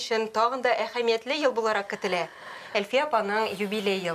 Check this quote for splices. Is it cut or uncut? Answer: uncut